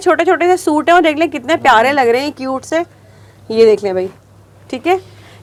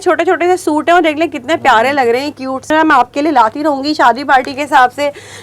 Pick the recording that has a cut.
second; 1 cut; at 2.7 s

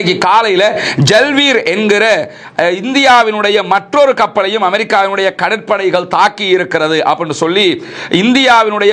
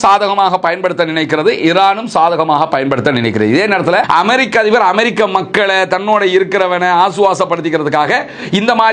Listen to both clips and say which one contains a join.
second; 1 cut; at 3.5 s

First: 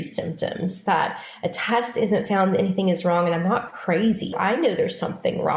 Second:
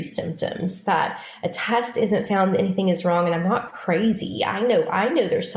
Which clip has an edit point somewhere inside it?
first; 1 cut; at 4.3 s

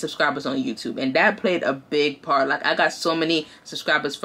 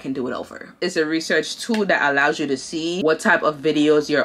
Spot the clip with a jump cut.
second; 2 cuts; at 0.8 s, 3.0 s

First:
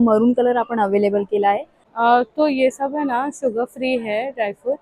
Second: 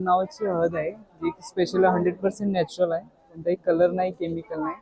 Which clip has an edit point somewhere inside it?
first; 1 cut; at 1.8 s

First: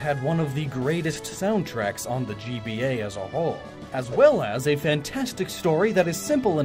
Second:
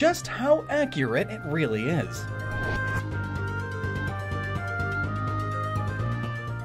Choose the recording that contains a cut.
first; 1 cut; at 5.1 s

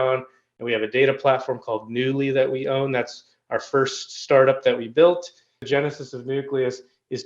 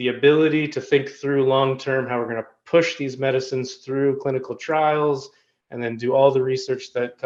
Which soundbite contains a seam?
first; 1 cut; at 5.5 s

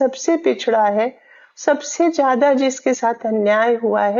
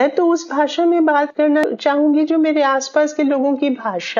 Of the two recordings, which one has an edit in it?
second; 1 cut; at 1.7 s

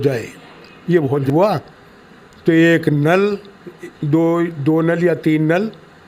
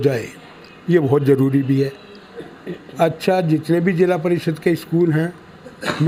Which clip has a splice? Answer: first; 1 cut; at 1.2 s

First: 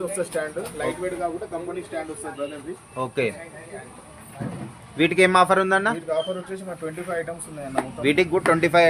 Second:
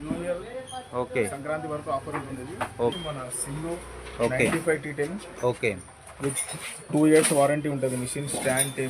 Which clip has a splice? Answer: second; 1 cut; at 3.0 s

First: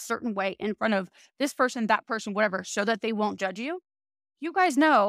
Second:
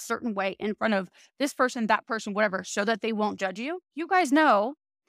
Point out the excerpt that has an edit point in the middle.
second; 1 cut; at 3.9 s

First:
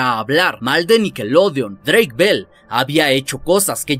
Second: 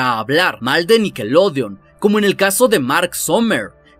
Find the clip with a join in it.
first; 1 cut; at 1.8 s

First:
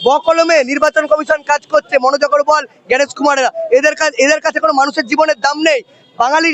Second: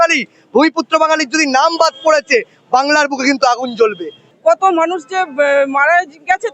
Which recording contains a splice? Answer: second; 1 cut; at 4.2 s

